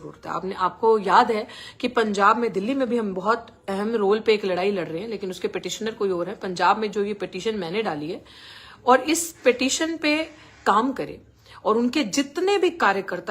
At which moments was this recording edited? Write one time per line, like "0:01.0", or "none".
0:10.6